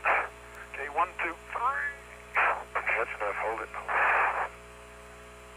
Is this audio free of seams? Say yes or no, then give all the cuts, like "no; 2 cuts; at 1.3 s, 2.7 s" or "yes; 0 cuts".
yes; 0 cuts